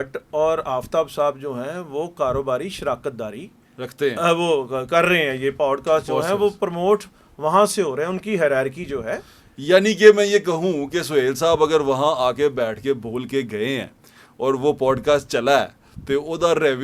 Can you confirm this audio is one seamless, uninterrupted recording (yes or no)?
yes